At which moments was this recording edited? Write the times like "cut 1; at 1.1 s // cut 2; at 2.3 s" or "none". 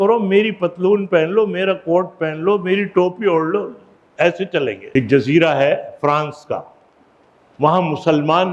cut 1; at 4.9 s